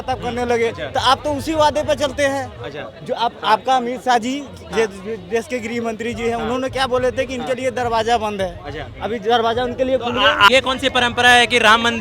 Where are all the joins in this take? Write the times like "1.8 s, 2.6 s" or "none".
10.5 s